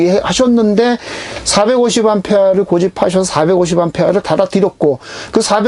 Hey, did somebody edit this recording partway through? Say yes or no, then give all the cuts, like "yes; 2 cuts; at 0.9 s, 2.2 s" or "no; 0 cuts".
no; 0 cuts